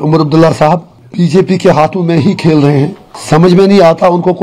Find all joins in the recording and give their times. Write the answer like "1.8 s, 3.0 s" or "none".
1.0 s, 3.1 s

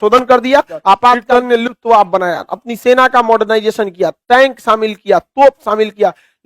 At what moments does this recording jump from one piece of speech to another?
1.2 s

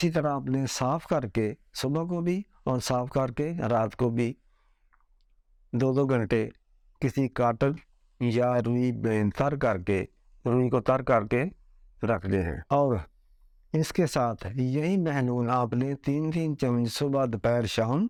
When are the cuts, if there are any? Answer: none

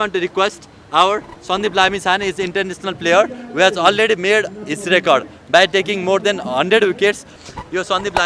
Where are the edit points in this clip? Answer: 7.3 s

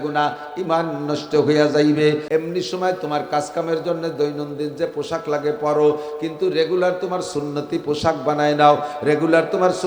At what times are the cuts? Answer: 2.2 s

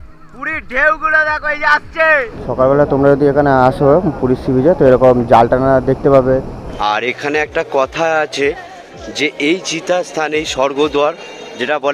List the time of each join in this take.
2.4 s, 6.6 s

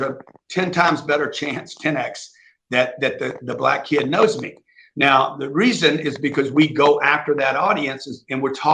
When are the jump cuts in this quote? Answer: none

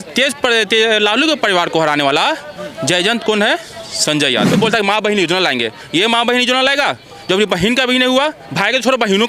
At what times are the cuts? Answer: 4.5 s

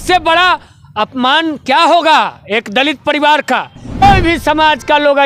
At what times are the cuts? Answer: 4.0 s

